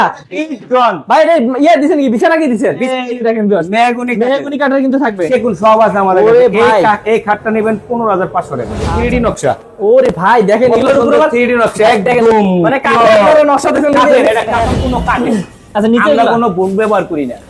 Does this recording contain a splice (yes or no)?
yes